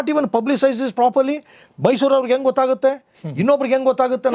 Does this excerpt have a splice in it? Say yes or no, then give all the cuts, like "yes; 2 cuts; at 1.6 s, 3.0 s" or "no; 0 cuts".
no; 0 cuts